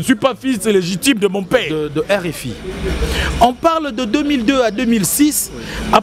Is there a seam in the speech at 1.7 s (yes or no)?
yes